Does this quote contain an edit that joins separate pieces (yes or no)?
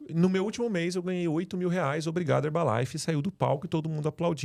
no